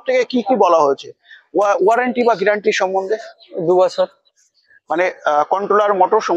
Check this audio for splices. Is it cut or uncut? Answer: uncut